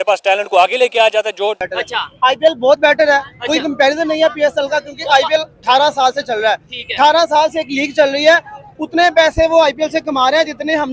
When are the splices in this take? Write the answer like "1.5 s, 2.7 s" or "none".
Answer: 1.6 s